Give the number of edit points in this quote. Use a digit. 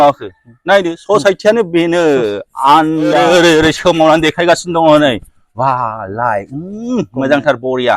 1